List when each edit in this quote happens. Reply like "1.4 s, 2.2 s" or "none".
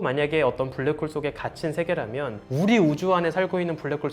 2.4 s